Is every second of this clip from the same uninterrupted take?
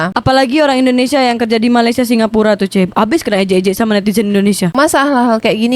no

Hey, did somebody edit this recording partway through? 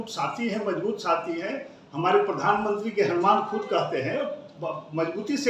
no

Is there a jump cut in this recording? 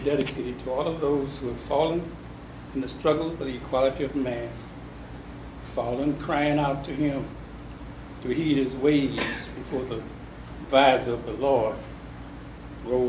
yes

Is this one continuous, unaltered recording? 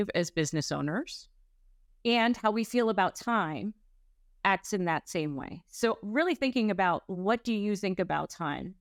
yes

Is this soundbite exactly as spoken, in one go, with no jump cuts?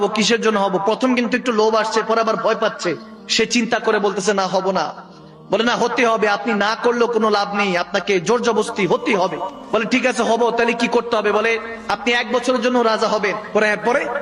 yes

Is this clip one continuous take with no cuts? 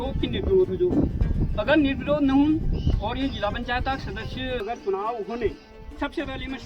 no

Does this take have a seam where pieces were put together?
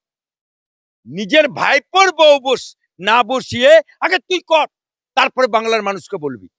no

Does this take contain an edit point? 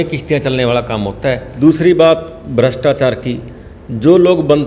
yes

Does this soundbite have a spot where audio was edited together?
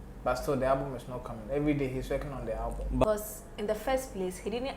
yes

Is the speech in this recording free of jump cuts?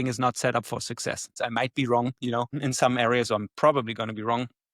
no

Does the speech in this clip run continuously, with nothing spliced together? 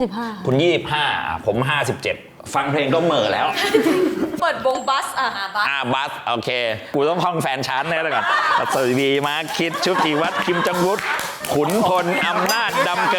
no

